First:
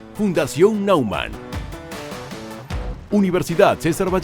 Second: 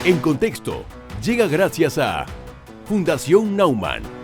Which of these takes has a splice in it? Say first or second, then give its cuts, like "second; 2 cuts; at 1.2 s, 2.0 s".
first; 1 cut; at 3.0 s